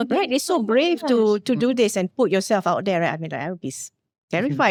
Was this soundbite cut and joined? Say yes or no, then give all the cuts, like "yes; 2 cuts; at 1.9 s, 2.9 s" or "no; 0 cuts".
no; 0 cuts